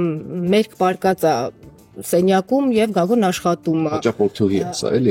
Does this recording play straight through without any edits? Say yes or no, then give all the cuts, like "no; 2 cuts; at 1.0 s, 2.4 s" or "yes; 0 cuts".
yes; 0 cuts